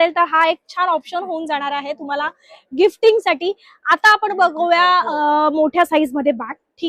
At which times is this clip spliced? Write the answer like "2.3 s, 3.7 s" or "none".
none